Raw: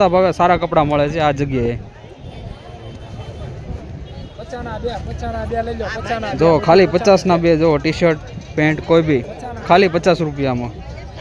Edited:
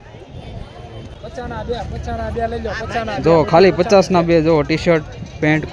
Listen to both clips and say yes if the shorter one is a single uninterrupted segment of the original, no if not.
no